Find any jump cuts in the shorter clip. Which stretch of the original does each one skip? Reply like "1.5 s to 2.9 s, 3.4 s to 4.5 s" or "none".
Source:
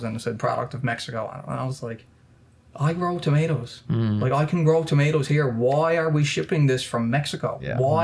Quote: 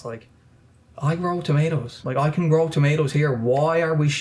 3.9 s to 4.2 s